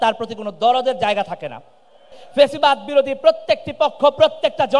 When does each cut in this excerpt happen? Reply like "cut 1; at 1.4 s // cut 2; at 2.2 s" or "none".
cut 1; at 2.2 s

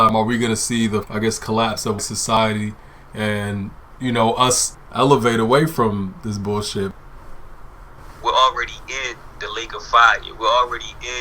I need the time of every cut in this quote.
cut 1; at 1.1 s // cut 2; at 2.4 s // cut 3; at 4.7 s

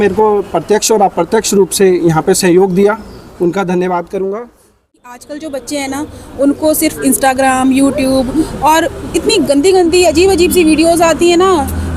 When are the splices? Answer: cut 1; at 5.1 s

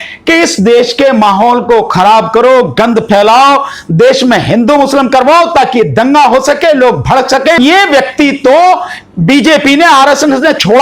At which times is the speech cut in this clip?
cut 1; at 7.6 s

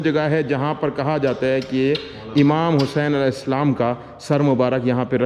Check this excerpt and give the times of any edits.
none

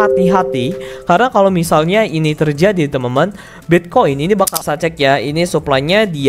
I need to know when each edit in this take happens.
cut 1; at 4.6 s

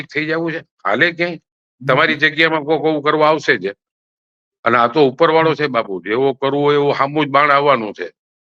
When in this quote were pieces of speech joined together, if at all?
none

